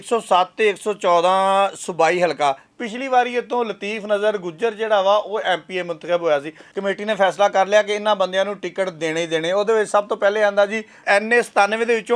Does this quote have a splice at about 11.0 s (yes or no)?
yes